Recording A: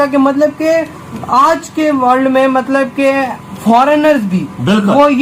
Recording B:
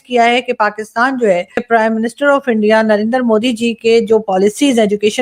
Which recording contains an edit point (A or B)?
B